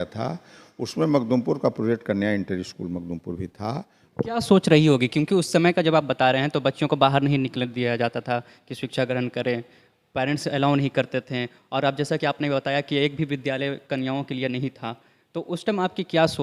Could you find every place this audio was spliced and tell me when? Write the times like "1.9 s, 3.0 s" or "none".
4.0 s

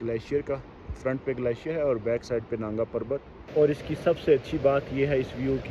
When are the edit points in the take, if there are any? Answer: 3.6 s

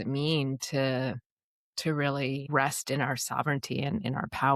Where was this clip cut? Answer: 2.4 s

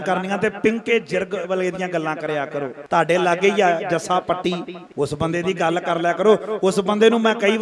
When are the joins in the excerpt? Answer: none

